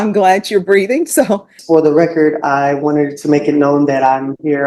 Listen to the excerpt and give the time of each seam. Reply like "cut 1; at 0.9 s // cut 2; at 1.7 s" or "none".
cut 1; at 1.5 s